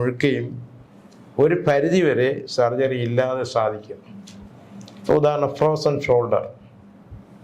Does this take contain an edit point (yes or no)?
no